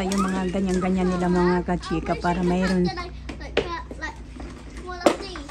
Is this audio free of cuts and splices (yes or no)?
yes